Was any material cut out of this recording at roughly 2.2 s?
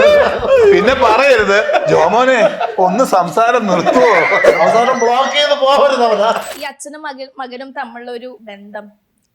no; 2 cuts; at 6.5 s, 8.4 s

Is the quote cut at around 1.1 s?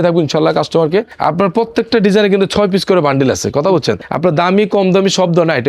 yes; 2 cuts; at 1.1 s, 4.0 s

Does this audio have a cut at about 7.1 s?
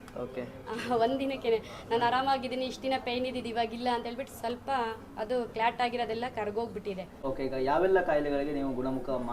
yes; 1 cut; at 7.1 s

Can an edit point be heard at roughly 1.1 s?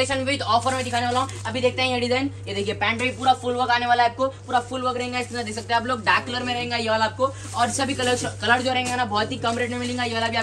no; 0 cuts

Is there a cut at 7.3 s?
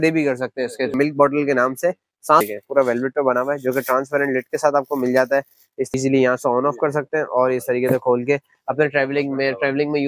no; 3 cuts; at 0.9 s, 2.4 s, 5.9 s

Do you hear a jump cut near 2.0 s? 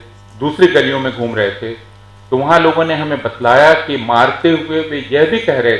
no; 0 cuts

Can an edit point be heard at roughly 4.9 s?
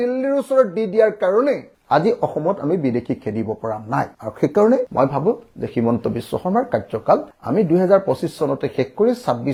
no; 0 cuts

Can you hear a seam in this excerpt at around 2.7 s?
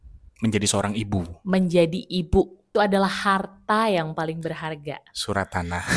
yes; 1 cut; at 2.7 s

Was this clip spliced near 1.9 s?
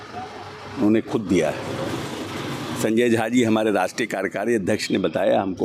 no; 0 cuts

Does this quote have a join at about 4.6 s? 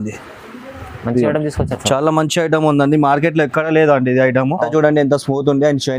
yes; 1 cut; at 4.6 s

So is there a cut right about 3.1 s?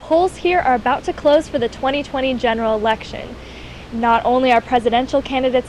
no; 0 cuts

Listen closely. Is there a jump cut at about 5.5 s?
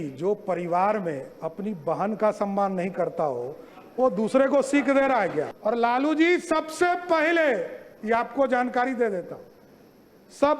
yes; 1 cut; at 5.5 s

